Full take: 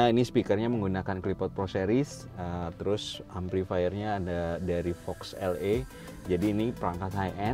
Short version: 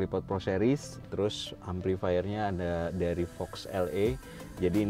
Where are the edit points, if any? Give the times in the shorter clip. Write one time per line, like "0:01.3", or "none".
0:01.0

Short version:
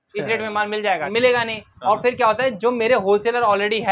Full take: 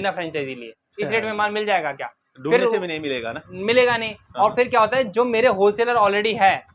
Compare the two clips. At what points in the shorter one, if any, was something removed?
0:01.0

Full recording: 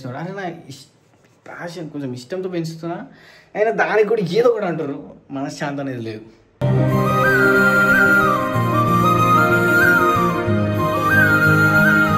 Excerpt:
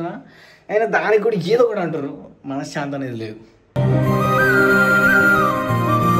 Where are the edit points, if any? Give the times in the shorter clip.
none

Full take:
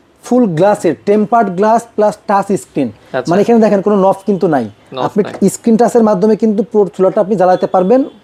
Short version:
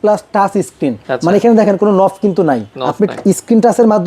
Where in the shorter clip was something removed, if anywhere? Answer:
0:01.0
0:02.8

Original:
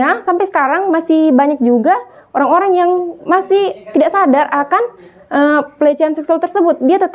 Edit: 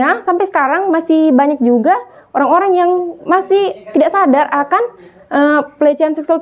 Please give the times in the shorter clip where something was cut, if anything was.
none

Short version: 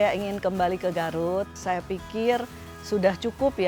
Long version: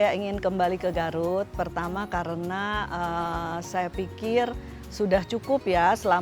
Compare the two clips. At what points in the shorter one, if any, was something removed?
0:01.5

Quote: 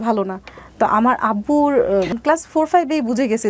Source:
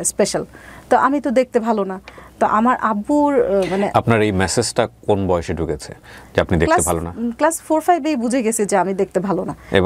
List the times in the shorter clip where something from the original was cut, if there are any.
0:02.1

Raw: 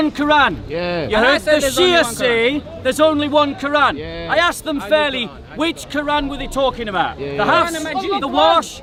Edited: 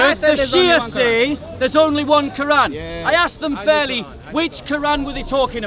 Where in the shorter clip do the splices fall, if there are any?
none

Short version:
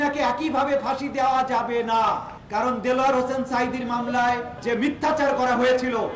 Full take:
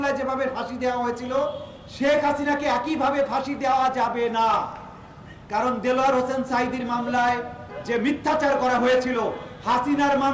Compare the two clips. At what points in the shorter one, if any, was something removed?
0:02.3
0:04.5

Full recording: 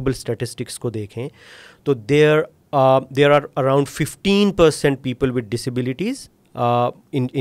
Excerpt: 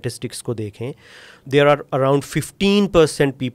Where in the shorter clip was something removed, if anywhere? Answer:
0:01.4

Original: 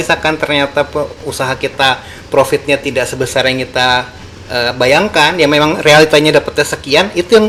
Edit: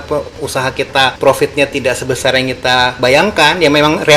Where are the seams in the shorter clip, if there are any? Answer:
0:01.2
0:03.0

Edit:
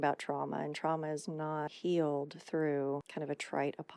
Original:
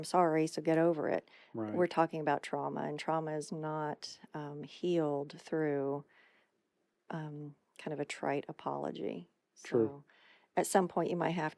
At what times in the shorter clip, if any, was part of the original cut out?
0:01.7
0:03.1

